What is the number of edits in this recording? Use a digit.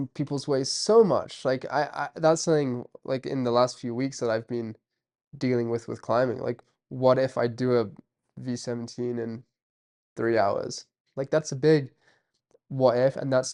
0